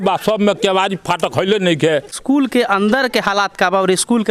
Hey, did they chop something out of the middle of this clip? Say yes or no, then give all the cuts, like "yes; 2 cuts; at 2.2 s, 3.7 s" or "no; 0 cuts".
yes; 1 cut; at 2.2 s